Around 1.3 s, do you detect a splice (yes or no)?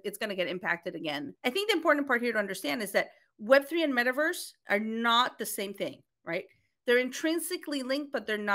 yes